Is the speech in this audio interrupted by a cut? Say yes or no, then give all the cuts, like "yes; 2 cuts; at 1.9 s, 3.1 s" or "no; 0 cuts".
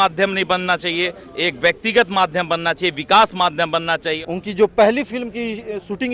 yes; 1 cut; at 4.1 s